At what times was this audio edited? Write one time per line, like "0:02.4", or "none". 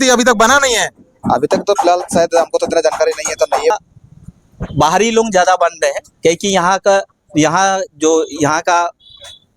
0:03.7